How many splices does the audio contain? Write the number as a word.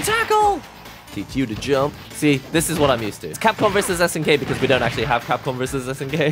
two